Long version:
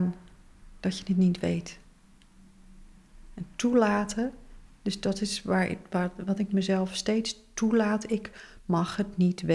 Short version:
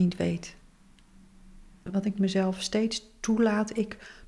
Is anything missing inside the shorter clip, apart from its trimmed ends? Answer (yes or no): yes